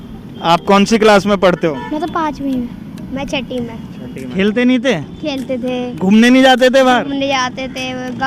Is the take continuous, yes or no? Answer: no